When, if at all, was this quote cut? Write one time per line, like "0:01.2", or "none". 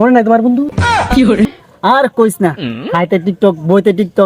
0:01.6

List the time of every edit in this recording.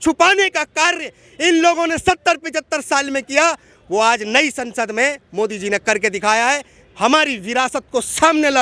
none

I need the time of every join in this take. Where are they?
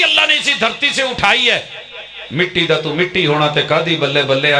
none

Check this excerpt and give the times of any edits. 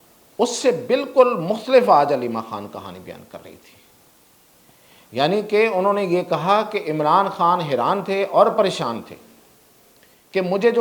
none

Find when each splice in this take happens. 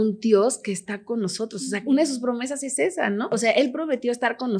0:01.9
0:03.3

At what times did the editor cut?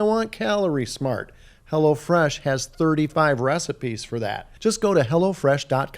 0:04.4

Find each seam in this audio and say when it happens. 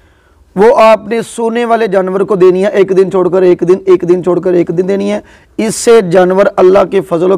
none

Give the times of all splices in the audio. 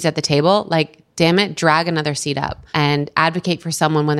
0:02.7

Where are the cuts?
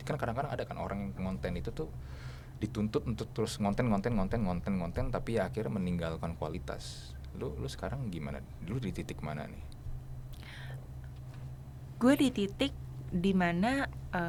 none

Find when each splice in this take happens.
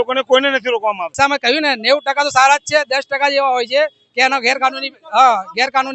0:01.1

